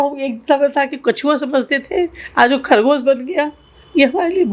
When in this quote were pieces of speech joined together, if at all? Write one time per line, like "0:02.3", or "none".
none